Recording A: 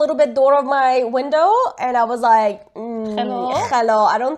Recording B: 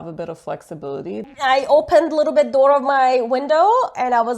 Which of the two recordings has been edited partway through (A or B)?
B